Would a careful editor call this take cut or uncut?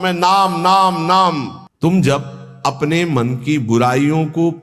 cut